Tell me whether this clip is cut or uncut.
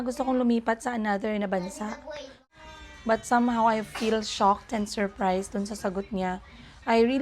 cut